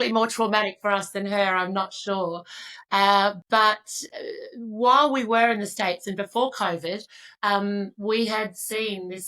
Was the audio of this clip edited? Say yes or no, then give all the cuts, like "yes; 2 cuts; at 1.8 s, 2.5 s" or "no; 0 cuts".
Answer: no; 0 cuts